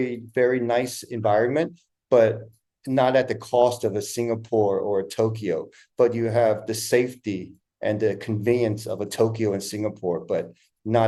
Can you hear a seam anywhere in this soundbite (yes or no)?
no